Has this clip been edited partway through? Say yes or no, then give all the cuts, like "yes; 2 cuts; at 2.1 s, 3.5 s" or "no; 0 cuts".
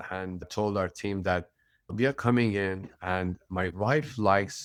no; 0 cuts